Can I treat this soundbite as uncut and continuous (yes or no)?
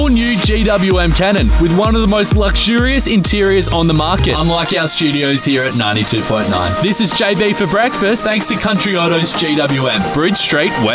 yes